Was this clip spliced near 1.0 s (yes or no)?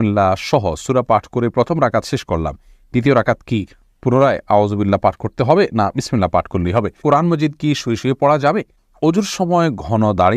no